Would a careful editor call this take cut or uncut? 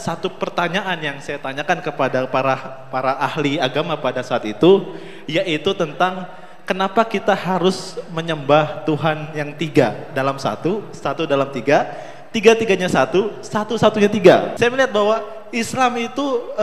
cut